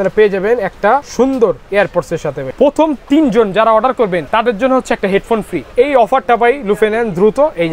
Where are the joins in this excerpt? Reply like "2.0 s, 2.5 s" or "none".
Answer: 1.1 s, 2.5 s, 4.3 s, 5.6 s